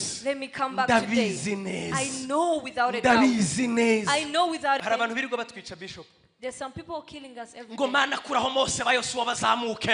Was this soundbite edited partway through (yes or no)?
yes